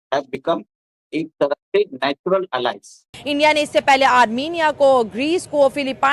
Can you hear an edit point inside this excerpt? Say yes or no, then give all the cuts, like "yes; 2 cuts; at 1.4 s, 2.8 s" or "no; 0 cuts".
yes; 1 cut; at 3.2 s